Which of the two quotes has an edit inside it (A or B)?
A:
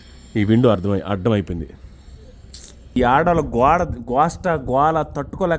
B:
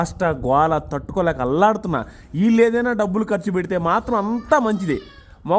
A